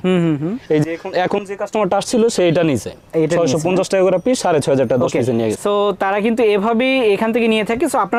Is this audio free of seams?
yes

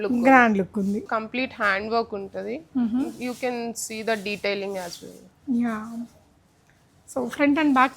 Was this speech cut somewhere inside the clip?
yes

